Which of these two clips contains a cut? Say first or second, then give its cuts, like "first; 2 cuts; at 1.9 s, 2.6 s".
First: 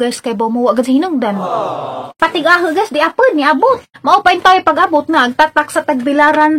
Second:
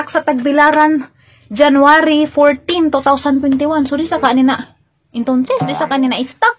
first; 2 cuts; at 2.2 s, 3.9 s